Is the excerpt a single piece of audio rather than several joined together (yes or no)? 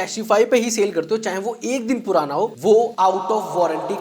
yes